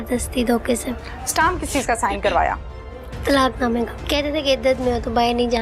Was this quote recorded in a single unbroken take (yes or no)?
no